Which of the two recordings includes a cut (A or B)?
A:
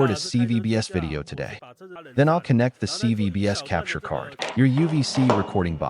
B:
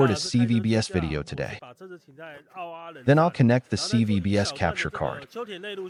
A